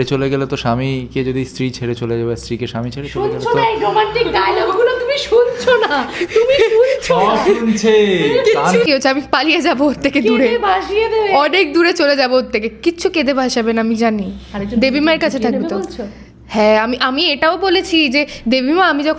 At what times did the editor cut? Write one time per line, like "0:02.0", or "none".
0:08.9